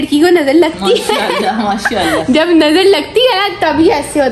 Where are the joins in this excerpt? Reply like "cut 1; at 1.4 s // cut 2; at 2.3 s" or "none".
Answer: cut 1; at 2.2 s